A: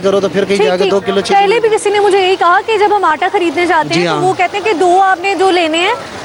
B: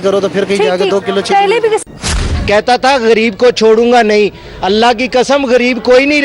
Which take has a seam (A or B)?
B